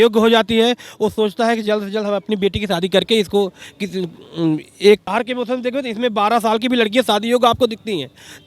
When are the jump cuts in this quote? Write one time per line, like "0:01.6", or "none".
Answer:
0:05.1